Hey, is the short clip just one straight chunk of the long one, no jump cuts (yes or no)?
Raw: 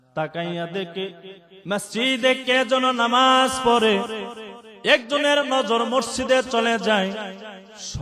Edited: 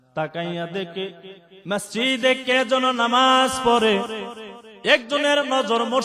yes